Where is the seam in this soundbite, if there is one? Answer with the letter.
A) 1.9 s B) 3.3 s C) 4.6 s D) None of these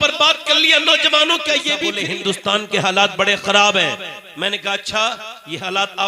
A